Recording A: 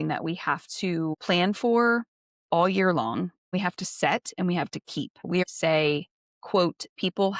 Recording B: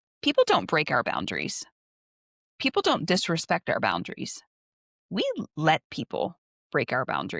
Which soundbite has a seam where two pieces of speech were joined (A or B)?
A